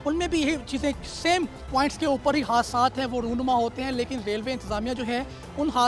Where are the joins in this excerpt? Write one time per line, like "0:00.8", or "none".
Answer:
0:01.6